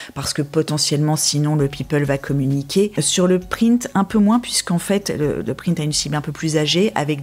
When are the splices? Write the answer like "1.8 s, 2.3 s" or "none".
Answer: 2.9 s